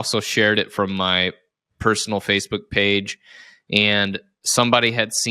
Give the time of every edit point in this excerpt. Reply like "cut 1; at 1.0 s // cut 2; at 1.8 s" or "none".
none